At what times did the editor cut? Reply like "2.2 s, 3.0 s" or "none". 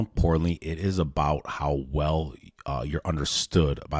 none